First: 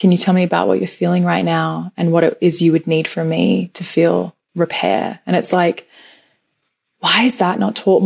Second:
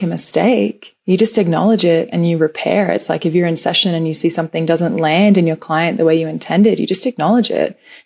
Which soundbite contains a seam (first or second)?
first